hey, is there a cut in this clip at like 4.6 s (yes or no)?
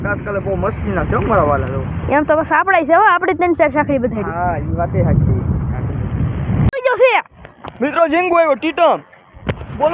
no